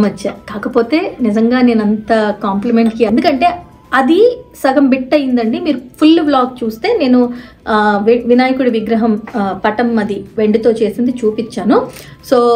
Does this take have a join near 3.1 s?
yes; 1 cut; at 3.1 s

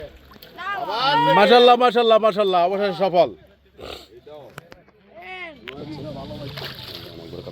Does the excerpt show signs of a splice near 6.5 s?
yes; 1 cut; at 6.5 s

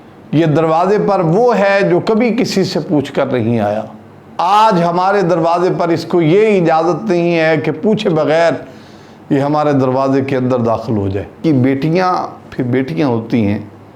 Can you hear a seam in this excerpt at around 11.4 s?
yes; 1 cut; at 11.4 s

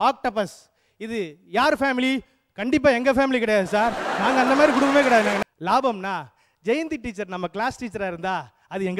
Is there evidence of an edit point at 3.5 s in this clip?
no; 1 cut; at 5.4 s

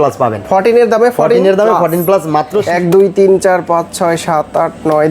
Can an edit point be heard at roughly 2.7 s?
yes; 1 cut; at 2.7 s

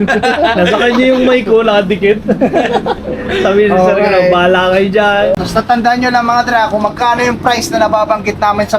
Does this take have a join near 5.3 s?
yes; 1 cut; at 5.3 s

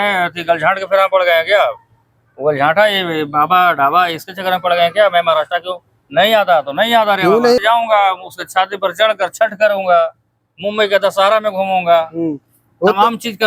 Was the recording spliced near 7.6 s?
yes; 1 cut; at 7.6 s

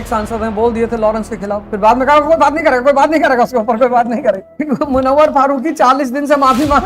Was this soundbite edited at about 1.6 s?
yes; 2 cuts; at 1.6 s, 4.5 s

